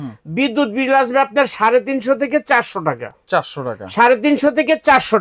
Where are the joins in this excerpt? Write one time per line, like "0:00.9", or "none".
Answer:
none